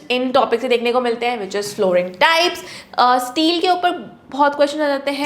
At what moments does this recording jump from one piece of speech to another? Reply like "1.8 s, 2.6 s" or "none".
2.7 s